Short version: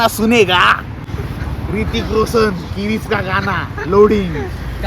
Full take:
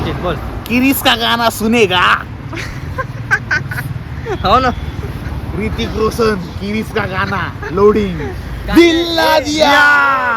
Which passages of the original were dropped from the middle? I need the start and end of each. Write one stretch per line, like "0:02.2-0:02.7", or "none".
0:02.5-0:04.9